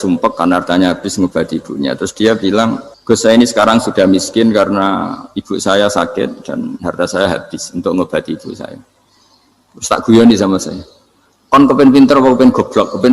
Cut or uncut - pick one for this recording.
cut